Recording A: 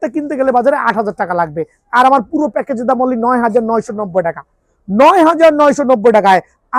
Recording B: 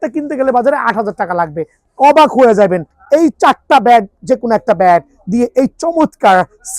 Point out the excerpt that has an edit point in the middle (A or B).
B